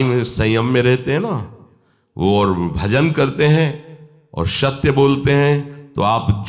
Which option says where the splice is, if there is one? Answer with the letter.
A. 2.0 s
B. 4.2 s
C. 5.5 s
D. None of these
D